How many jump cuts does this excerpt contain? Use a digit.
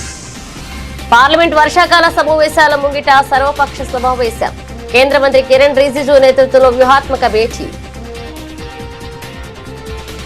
1